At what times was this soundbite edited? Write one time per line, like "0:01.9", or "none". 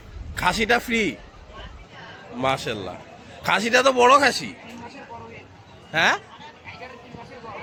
none